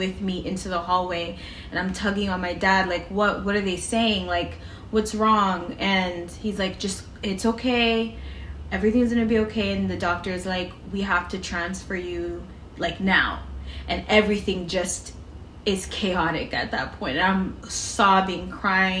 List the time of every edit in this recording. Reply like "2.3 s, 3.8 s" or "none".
none

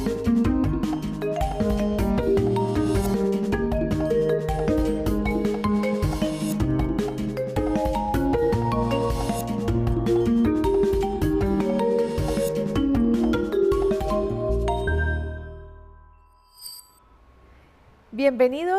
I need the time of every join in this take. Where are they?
2.8 s

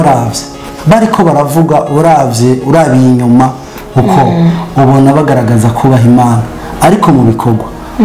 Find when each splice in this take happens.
none

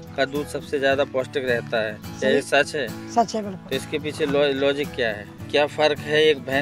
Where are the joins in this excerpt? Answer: 5.3 s

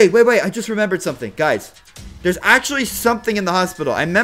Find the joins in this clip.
none

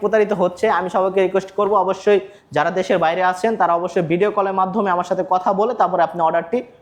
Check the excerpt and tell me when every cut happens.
none

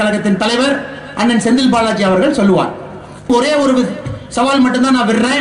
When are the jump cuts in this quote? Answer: 3.3 s

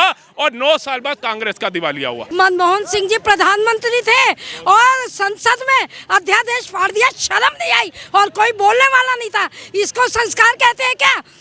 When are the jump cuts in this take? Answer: 2.2 s

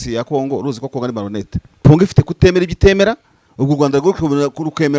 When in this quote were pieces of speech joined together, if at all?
1.8 s

